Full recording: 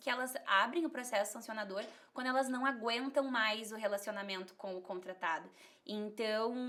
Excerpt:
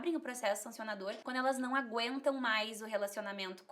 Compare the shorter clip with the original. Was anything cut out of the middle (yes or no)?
yes